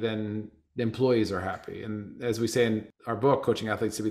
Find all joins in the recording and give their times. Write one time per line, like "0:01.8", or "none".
0:02.9